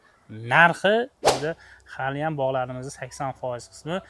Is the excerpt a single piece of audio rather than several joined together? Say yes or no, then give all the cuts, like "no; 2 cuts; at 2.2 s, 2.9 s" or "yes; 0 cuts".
no; 1 cut; at 1.2 s